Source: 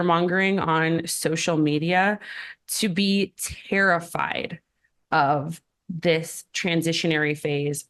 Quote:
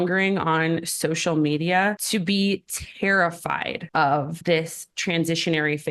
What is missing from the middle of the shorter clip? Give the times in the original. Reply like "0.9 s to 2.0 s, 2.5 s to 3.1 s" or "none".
2.2 s to 2.7 s, 4.5 s to 4.9 s, 5.5 s to 5.9 s